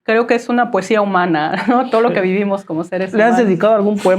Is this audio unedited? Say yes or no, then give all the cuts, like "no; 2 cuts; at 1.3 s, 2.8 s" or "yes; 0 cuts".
yes; 0 cuts